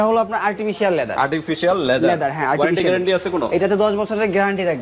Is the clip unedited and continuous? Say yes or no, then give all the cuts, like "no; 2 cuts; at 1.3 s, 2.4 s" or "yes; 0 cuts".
yes; 0 cuts